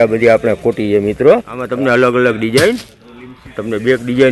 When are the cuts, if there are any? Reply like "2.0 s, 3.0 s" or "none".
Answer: 1.6 s